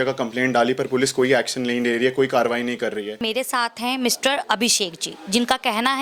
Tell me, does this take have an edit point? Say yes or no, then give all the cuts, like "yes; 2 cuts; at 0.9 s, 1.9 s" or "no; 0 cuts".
yes; 1 cut; at 3.2 s